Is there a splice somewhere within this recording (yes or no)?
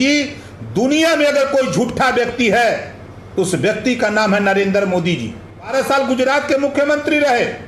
yes